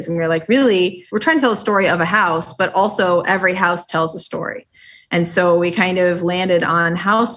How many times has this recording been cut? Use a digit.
1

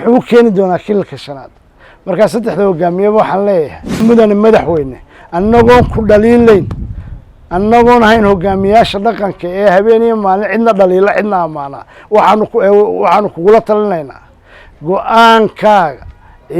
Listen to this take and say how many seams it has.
1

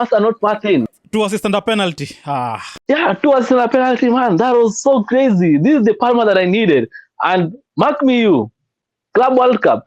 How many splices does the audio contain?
2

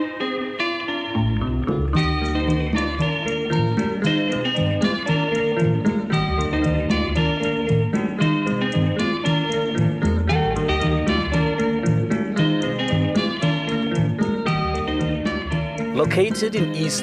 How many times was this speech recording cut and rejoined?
1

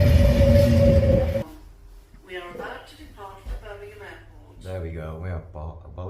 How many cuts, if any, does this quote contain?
1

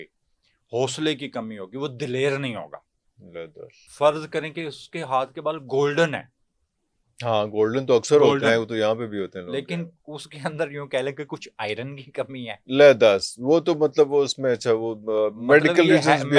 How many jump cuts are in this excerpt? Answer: 1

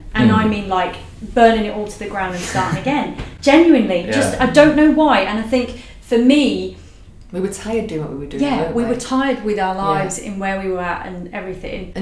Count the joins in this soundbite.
0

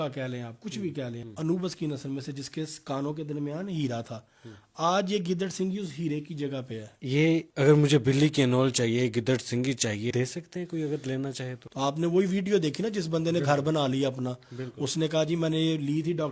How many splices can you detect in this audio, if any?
4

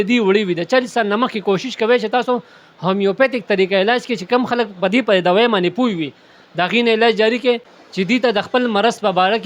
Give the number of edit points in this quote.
1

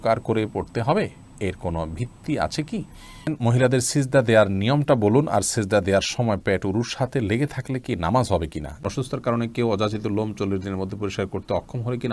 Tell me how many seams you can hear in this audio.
2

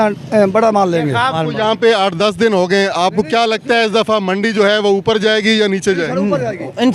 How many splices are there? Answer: 1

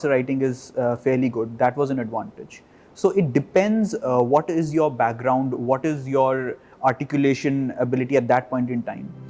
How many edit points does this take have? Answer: 0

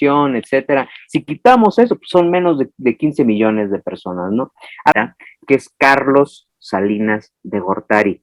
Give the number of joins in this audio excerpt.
1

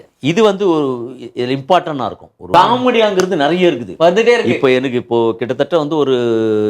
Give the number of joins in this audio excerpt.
1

